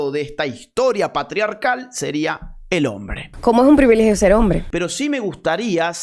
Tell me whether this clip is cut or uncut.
cut